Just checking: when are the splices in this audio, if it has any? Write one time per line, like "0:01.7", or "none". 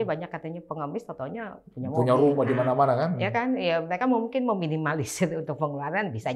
none